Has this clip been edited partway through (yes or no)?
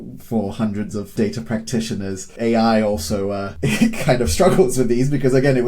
yes